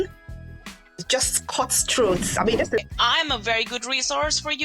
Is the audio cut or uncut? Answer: cut